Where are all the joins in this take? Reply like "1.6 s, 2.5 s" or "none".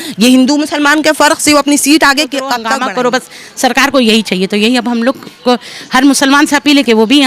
2.6 s